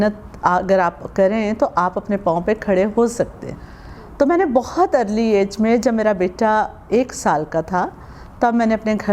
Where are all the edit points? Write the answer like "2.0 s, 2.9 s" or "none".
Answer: none